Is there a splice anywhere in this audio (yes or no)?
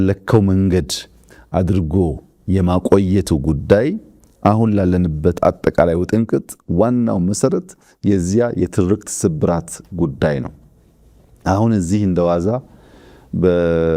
no